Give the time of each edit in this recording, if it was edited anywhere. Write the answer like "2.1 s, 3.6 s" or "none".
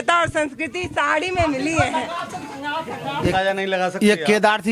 3.3 s